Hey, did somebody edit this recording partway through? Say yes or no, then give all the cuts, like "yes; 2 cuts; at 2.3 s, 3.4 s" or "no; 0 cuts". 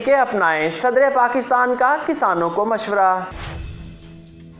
yes; 1 cut; at 3.5 s